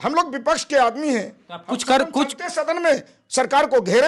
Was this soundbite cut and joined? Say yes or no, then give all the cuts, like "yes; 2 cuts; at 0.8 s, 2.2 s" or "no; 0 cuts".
no; 0 cuts